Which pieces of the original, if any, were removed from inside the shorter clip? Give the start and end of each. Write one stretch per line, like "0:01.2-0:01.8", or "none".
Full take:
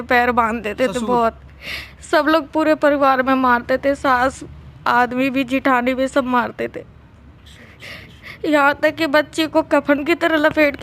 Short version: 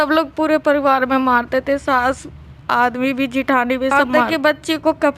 0:06.3-0:08.8